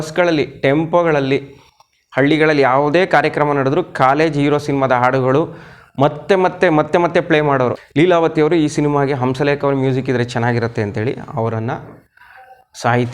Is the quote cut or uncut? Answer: cut